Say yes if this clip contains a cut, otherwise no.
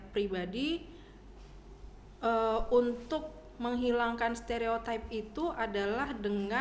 no